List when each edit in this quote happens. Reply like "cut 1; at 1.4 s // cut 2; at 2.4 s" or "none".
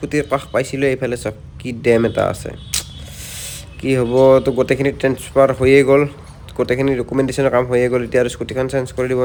none